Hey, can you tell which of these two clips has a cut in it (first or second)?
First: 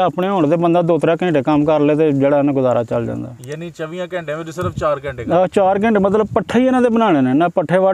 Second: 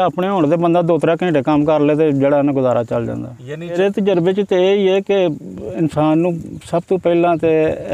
second